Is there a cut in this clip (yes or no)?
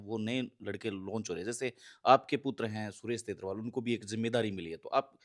no